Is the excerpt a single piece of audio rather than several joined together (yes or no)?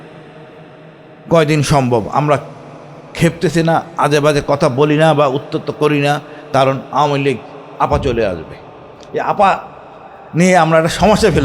yes